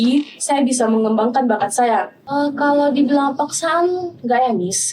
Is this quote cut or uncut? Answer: cut